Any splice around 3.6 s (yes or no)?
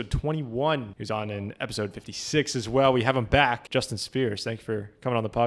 yes